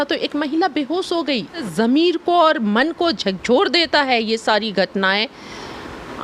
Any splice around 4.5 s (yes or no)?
no